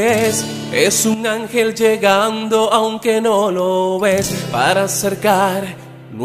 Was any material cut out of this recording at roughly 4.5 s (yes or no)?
no